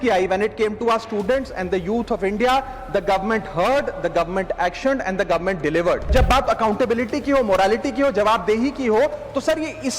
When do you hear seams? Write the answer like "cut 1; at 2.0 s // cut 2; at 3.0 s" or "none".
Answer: cut 1; at 6.1 s